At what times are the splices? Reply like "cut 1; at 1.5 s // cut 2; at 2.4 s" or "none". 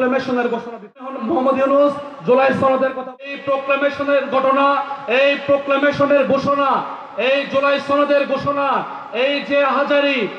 cut 1; at 1.1 s // cut 2; at 3.2 s